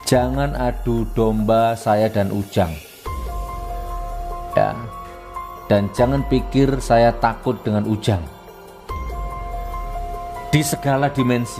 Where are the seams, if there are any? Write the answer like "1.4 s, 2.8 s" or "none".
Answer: 2.7 s, 4.2 s, 8.2 s, 10.0 s